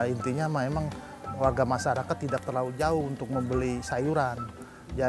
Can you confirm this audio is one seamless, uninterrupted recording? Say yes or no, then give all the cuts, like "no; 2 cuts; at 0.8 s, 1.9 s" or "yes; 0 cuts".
yes; 0 cuts